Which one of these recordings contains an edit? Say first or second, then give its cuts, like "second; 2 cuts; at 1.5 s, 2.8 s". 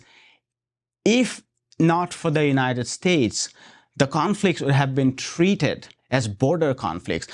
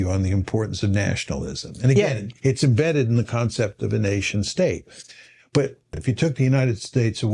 second; 1 cut; at 6.0 s